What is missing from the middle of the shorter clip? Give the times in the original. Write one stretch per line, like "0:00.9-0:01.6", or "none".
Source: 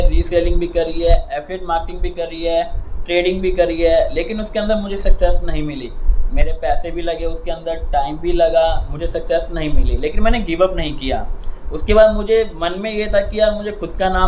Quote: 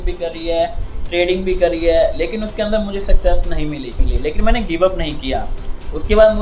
0:06.0-0:09.9